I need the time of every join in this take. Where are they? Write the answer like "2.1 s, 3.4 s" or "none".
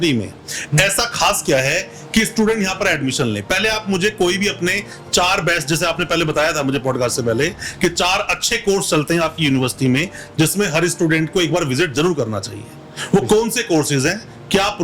none